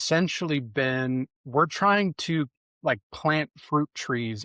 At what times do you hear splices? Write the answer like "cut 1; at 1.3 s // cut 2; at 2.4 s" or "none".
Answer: cut 1; at 1.4 s